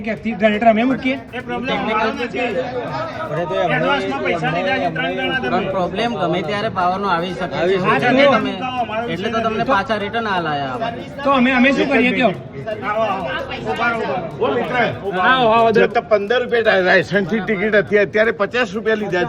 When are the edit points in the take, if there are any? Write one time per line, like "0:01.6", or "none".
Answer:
none